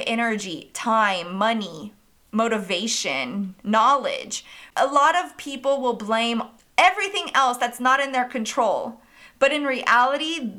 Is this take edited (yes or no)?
yes